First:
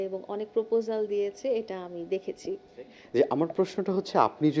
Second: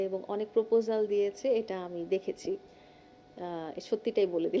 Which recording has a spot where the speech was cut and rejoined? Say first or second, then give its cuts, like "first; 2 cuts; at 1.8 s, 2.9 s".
first; 1 cut; at 3.0 s